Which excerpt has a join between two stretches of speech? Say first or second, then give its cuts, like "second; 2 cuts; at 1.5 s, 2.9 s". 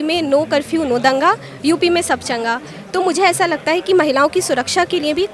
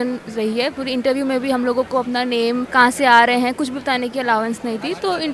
second; 1 cut; at 2.7 s